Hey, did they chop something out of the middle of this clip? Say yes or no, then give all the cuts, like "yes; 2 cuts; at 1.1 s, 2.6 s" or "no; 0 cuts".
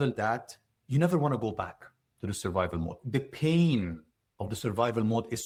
no; 0 cuts